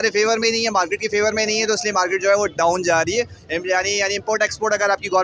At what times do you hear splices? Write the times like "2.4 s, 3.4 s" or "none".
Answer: none